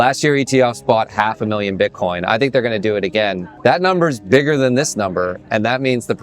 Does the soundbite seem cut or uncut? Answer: cut